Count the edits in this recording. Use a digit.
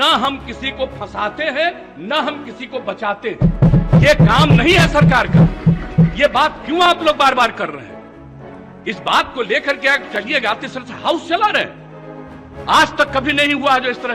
0